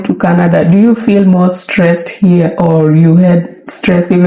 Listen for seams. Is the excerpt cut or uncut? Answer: uncut